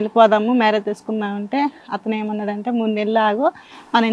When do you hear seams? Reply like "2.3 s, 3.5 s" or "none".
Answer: none